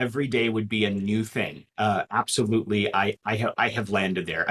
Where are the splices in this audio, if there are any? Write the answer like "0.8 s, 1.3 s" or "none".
none

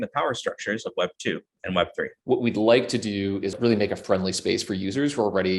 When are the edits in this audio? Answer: 2.2 s, 3.6 s

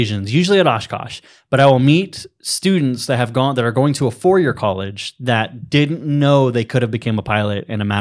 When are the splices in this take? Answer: none

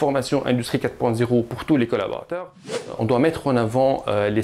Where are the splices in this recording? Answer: 2.9 s

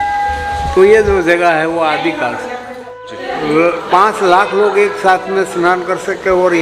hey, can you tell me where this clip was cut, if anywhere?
3.3 s

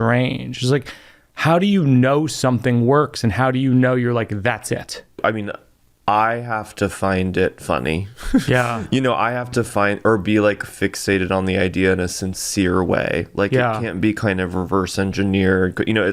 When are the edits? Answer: 5.2 s

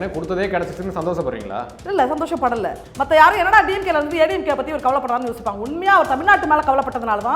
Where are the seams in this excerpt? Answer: 2.8 s

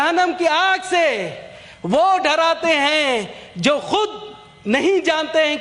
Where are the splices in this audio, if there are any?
none

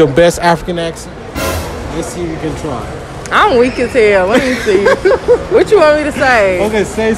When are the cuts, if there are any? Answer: none

